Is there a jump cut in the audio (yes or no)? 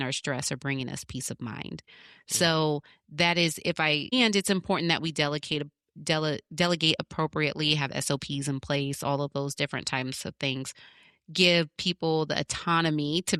no